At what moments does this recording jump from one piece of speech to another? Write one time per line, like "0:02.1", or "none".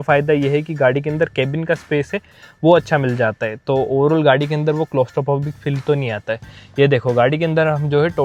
none